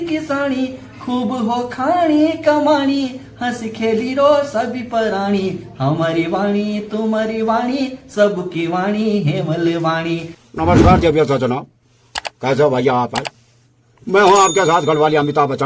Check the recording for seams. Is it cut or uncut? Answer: cut